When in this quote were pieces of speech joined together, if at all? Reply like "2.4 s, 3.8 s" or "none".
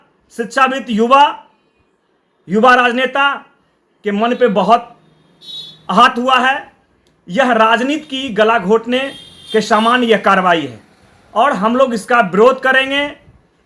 none